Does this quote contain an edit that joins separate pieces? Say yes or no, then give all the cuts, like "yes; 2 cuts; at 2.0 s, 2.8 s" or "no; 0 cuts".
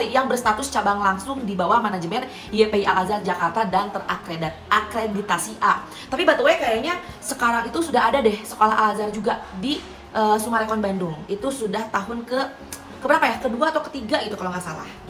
no; 0 cuts